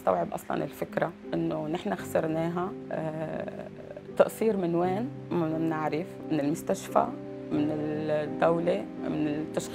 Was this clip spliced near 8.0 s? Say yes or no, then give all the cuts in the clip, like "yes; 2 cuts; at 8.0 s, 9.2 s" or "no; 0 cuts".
no; 3 cuts; at 1.2 s, 2.8 s, 5.2 s